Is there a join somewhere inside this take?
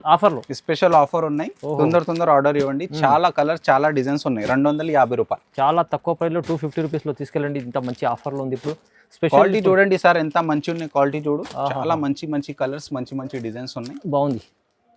no; 0 cuts

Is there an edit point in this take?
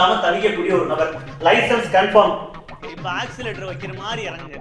yes; 1 cut; at 2.6 s

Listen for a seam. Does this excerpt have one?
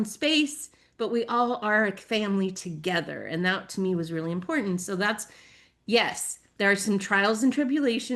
no; 0 cuts

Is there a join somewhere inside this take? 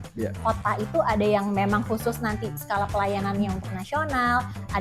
no; 0 cuts

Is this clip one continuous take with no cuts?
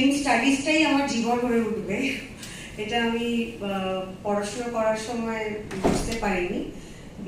yes; 0 cuts

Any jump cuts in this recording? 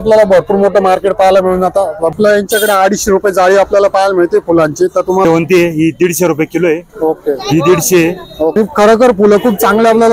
yes; 3 cuts; at 2.1 s, 5.2 s, 8.5 s

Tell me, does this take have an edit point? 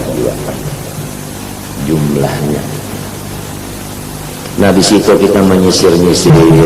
no; 0 cuts

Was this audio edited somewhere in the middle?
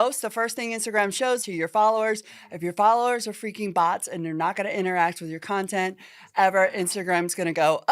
yes; 1 cut; at 1.5 s

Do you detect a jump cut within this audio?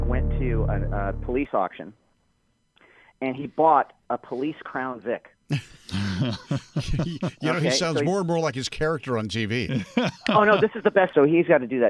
no; 0 cuts

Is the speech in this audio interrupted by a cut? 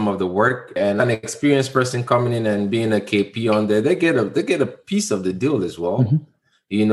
yes; 1 cut; at 1.0 s

